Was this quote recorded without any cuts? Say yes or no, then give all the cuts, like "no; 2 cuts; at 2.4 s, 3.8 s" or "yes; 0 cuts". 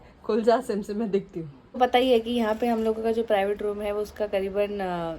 no; 1 cut; at 1.8 s